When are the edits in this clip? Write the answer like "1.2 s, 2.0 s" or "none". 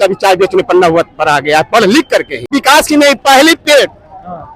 2.5 s